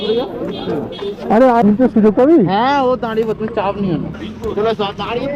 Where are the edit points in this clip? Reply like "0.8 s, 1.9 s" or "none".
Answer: 1.6 s, 4.2 s